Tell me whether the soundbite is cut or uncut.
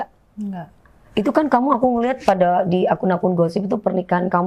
cut